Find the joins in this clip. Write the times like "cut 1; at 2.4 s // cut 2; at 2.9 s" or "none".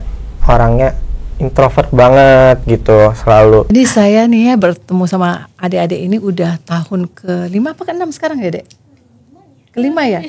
cut 1; at 3.7 s

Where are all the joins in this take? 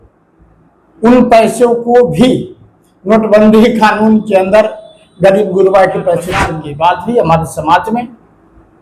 cut 1; at 6.6 s

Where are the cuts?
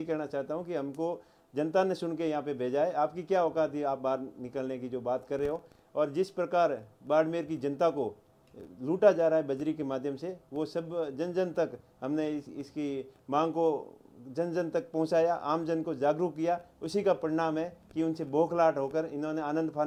none

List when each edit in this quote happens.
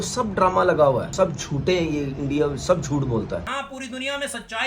cut 1; at 1.1 s // cut 2; at 3.5 s

